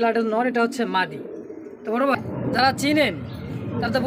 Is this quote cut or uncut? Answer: cut